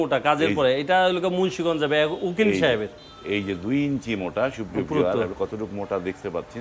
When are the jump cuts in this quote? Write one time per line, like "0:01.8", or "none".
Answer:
none